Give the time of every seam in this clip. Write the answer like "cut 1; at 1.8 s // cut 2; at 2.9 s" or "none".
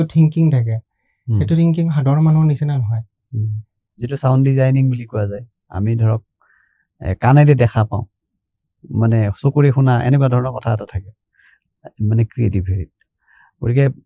cut 1; at 4.0 s